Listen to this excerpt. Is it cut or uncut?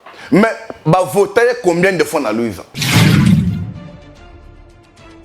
cut